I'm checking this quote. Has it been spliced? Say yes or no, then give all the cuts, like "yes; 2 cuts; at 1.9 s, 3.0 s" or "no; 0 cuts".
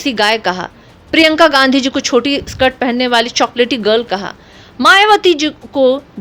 no; 0 cuts